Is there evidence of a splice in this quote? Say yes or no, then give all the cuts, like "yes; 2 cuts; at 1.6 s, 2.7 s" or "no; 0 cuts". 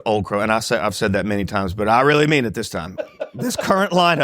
yes; 1 cut; at 3.1 s